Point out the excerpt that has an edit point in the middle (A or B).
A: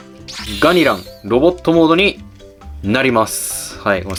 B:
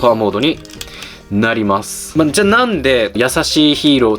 B